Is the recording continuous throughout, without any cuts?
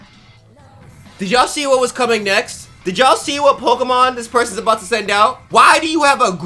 no; 1 cut; at 5.4 s

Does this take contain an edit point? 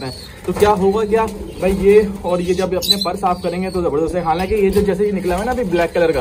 no; 0 cuts

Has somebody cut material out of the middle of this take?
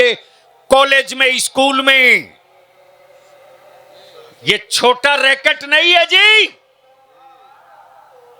no; 0 cuts

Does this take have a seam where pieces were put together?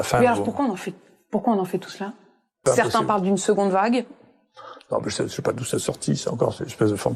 yes; 1 cut; at 2.6 s

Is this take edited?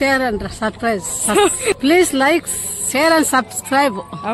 yes; 1 cut; at 1.8 s

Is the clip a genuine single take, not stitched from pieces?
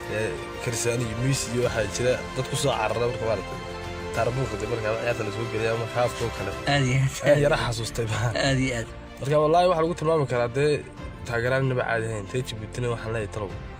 yes; 0 cuts

